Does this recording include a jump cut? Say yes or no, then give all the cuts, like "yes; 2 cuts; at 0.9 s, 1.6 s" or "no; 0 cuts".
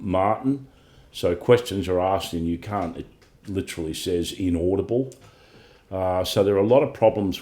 no; 0 cuts